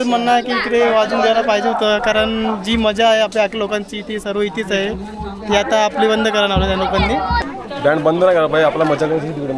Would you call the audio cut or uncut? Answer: cut